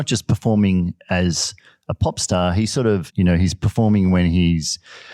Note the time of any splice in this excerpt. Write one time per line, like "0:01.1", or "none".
0:03.1

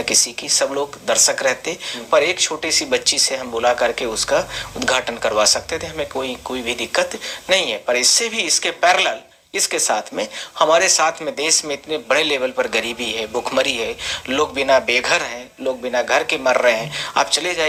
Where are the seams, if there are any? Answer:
none

